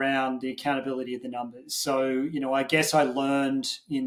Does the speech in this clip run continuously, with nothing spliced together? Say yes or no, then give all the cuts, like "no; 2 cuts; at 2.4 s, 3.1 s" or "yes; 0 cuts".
yes; 0 cuts